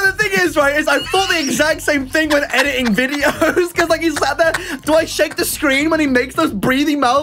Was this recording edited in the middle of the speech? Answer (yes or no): no